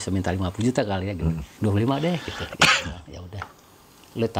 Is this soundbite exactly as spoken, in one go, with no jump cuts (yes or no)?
no